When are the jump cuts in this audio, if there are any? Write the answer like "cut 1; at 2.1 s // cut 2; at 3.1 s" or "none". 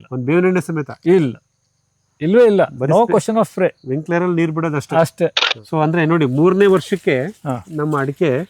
cut 1; at 5.5 s

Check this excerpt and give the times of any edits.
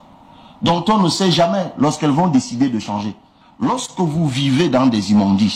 cut 1; at 3.4 s

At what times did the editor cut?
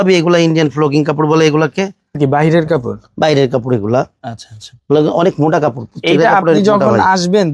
cut 1; at 2.2 s

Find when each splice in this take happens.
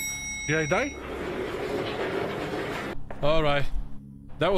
cut 1; at 2.9 s

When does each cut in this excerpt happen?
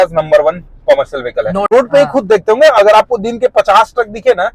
cut 1; at 1.7 s

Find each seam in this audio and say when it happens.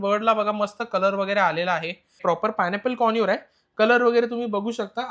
cut 1; at 2.1 s

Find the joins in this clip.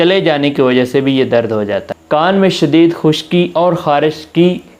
cut 1; at 1.9 s

